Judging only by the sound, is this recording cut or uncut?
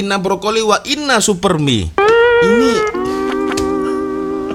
uncut